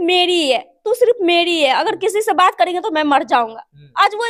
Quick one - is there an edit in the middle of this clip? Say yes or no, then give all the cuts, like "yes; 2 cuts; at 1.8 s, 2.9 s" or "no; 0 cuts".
no; 0 cuts